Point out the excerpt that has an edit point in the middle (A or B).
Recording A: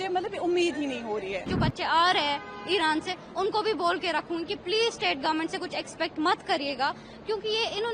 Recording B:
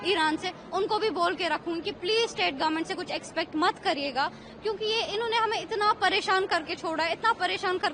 A